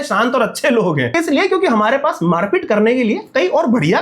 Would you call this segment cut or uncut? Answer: cut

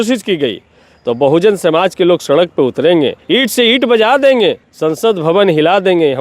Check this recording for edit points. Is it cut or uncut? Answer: cut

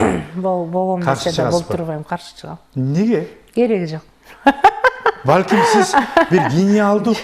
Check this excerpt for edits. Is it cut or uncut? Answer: uncut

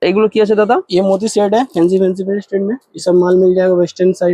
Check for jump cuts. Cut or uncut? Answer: uncut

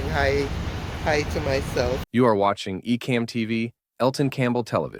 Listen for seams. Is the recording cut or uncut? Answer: cut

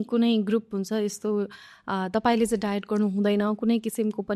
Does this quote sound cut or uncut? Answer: uncut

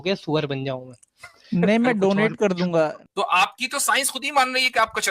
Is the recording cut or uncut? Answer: cut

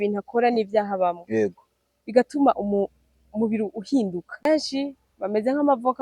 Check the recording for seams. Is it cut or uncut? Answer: cut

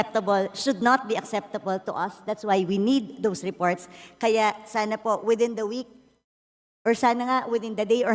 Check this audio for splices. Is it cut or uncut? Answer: uncut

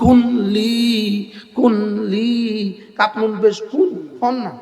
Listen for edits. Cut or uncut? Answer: uncut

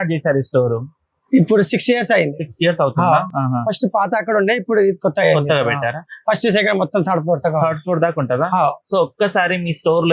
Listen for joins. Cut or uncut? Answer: uncut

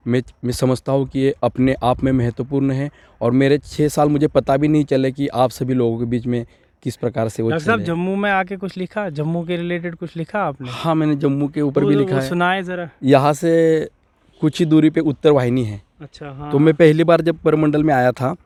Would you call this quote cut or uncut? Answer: uncut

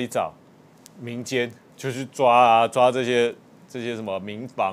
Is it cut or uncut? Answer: uncut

